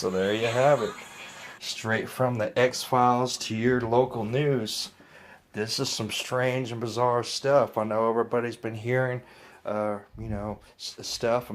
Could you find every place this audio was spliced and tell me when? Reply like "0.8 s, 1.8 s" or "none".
9.1 s